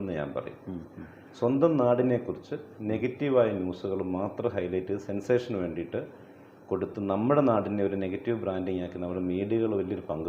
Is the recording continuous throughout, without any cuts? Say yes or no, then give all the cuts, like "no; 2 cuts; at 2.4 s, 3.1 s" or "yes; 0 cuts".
yes; 0 cuts